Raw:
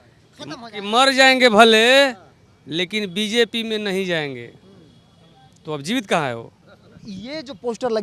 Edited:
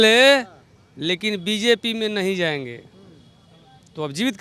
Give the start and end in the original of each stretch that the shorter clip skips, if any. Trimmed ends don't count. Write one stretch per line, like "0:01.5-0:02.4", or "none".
none